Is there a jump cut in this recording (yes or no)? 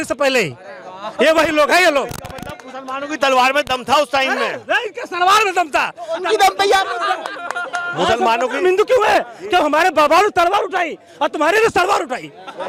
no